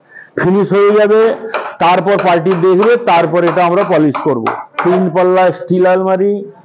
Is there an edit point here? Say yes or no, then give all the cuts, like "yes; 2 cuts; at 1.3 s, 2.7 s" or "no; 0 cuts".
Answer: yes; 1 cut; at 4.8 s